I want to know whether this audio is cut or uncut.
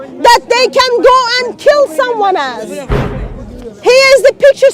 cut